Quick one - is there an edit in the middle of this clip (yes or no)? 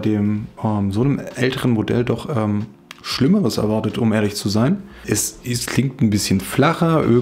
yes